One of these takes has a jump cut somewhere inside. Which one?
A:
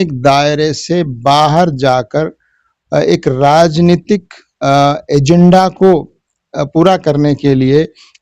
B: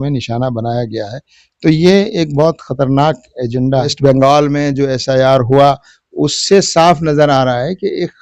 B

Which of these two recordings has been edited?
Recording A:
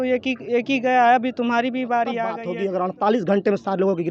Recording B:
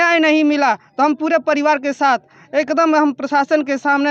A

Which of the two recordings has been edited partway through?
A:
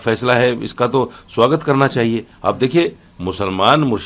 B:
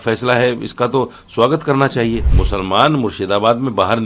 B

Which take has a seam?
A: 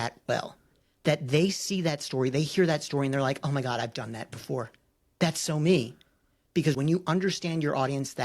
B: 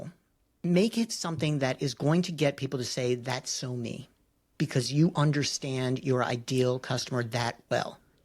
A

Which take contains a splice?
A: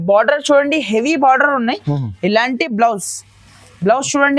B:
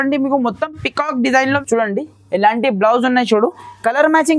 B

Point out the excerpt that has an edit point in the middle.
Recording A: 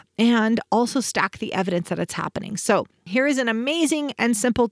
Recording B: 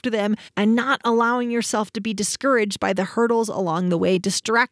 A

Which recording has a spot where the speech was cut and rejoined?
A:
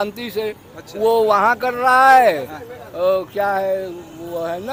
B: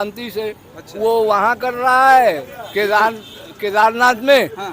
B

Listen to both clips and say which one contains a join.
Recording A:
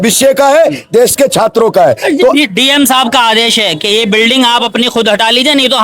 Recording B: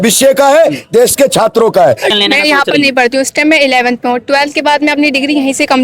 B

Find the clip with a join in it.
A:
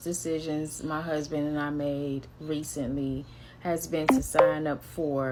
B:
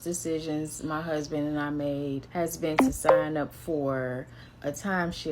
B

